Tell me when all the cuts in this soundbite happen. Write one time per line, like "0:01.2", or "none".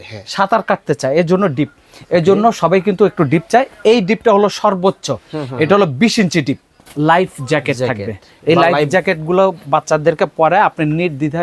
0:06.8